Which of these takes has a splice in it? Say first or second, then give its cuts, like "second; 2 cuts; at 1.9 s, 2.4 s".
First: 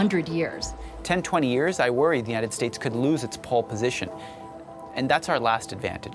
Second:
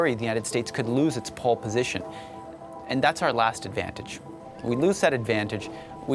first; 1 cut; at 0.9 s